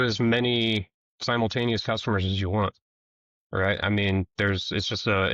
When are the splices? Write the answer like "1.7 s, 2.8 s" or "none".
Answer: none